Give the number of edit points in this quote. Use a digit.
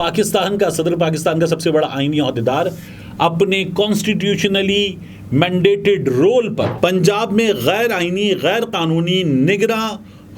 1